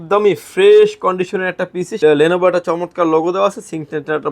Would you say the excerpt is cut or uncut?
cut